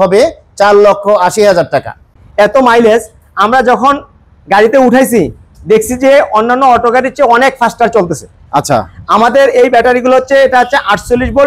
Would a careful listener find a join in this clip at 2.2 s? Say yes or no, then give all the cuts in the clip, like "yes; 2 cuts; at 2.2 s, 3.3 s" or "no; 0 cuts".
yes; 1 cut; at 2.2 s